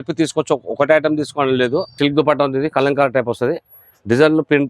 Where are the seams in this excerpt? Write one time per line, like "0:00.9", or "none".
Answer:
0:01.9